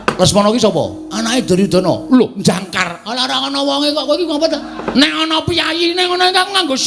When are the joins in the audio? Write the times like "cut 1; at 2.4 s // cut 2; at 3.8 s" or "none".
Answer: cut 1; at 4.8 s